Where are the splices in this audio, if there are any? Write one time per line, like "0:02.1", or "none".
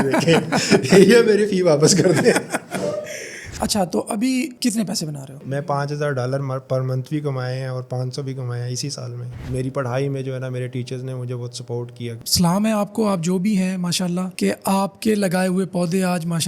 0:03.5
0:05.4
0:09.4
0:12.2